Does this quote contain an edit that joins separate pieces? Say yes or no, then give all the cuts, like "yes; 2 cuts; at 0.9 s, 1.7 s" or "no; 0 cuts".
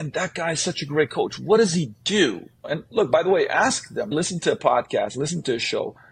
no; 0 cuts